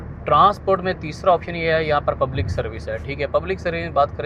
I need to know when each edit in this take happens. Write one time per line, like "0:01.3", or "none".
none